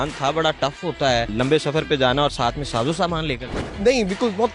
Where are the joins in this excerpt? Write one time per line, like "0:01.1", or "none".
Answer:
0:01.3
0:03.6